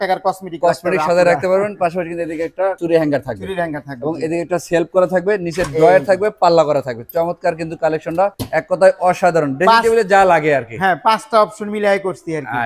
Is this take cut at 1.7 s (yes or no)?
no